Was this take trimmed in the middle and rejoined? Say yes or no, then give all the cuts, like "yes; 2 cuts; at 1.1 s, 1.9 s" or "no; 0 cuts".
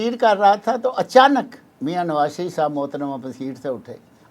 yes; 1 cut; at 1.6 s